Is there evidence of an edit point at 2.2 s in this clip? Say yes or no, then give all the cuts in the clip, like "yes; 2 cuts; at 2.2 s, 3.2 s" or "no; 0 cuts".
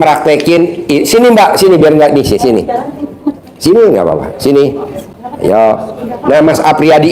no; 0 cuts